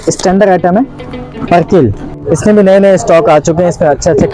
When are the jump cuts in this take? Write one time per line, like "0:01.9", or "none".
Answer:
0:02.1